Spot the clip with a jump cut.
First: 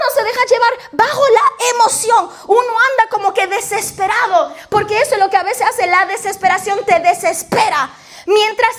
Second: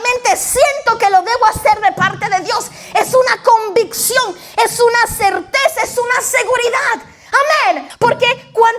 second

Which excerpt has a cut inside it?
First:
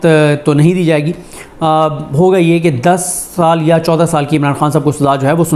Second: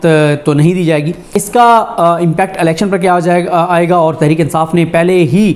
second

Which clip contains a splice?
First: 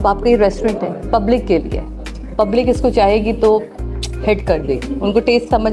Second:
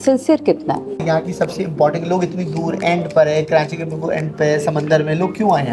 second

